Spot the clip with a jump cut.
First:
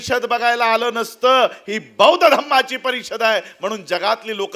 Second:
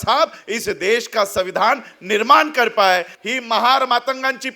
second; 1 cut; at 3.1 s

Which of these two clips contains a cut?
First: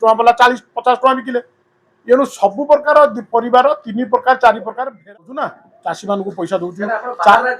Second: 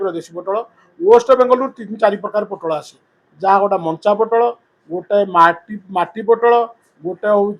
first; 1 cut; at 5.0 s

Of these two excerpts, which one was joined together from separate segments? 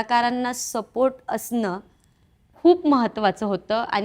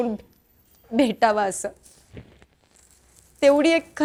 first; 1 cut; at 2.5 s

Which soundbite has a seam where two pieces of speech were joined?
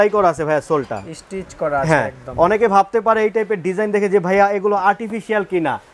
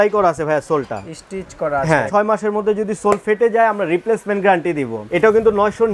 second; 2 cuts; at 2.1 s, 5.0 s

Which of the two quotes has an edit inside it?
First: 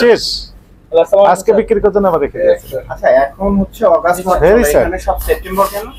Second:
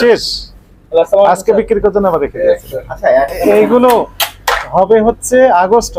second; 1 cut; at 3.3 s

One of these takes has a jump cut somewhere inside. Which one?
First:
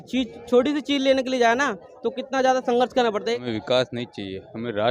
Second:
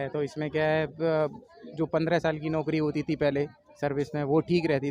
first; 1 cut; at 3.4 s

